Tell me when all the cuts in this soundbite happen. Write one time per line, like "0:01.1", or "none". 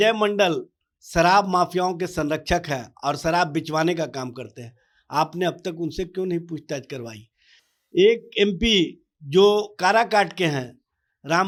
none